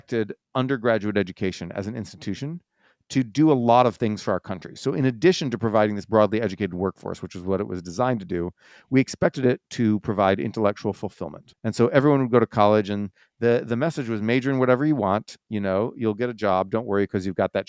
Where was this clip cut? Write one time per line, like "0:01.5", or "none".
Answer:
none